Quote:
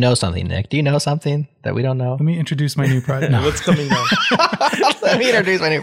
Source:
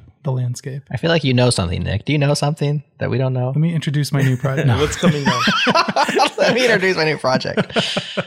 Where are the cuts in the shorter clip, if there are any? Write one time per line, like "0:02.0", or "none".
none

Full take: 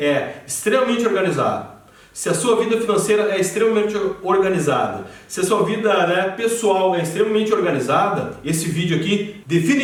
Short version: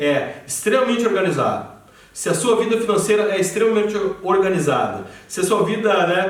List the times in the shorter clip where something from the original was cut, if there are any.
none

